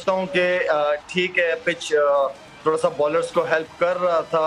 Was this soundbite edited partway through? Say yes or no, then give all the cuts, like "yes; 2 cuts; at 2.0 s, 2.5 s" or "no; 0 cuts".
no; 0 cuts